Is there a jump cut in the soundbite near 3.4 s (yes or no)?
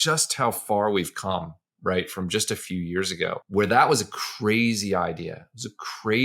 yes